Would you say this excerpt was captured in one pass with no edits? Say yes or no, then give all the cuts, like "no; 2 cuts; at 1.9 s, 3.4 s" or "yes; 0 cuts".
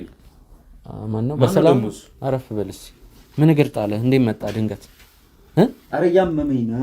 no; 1 cut; at 5.8 s